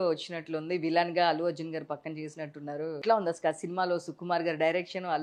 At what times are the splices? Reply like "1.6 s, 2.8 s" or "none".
3.0 s